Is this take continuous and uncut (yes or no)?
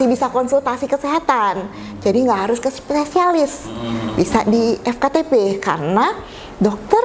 yes